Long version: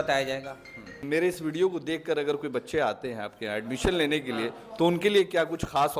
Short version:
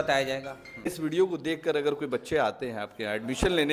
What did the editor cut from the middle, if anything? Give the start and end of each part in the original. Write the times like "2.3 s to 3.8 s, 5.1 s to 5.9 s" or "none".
1.1 s to 1.5 s